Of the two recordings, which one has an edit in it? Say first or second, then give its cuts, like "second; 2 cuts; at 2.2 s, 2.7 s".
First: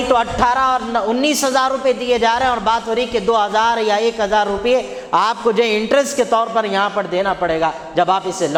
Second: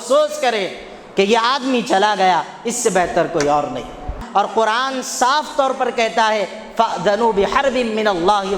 second; 1 cut; at 4.2 s